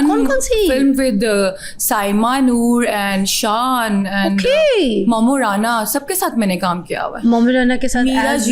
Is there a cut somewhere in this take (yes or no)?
no